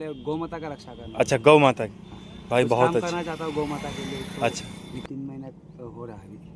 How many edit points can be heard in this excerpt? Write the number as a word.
one